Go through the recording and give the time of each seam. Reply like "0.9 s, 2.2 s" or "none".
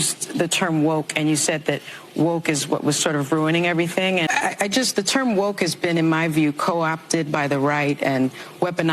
4.2 s